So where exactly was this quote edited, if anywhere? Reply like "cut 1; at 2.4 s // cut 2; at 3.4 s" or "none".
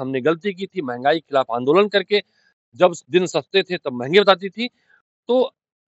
none